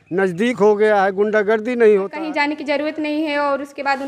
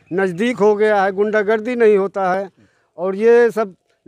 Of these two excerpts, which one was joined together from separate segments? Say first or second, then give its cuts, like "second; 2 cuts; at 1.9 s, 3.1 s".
first; 1 cut; at 2.1 s